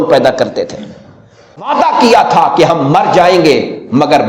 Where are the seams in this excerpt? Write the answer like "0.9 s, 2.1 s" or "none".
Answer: 1.6 s